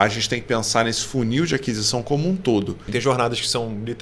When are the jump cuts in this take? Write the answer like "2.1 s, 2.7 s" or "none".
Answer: 2.8 s

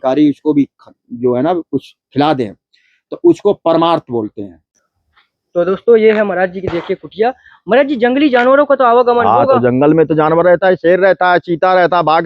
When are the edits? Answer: 5.3 s

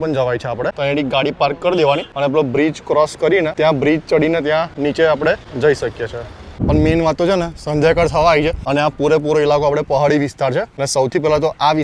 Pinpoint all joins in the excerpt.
0.8 s, 2.1 s, 3.5 s, 4.7 s, 5.5 s, 6.6 s, 8.6 s, 10.8 s

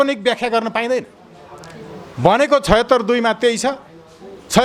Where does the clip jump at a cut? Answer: none

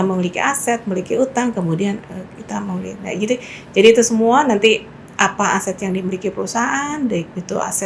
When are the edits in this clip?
none

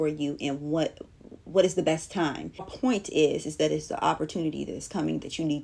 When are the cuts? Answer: 2.7 s

